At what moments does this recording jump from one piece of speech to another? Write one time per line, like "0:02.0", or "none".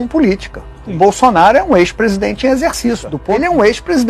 0:03.1